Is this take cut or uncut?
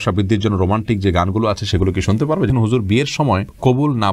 cut